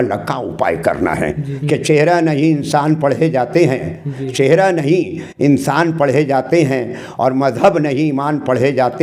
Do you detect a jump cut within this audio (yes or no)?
yes